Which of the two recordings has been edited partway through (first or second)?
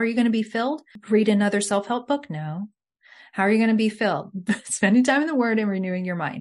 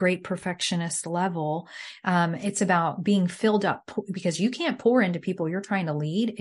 first